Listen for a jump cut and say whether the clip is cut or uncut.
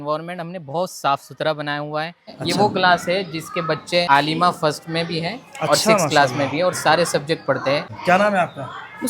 cut